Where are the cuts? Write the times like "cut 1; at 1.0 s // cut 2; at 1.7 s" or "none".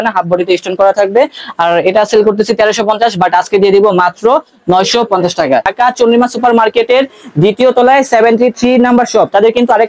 cut 1; at 5.7 s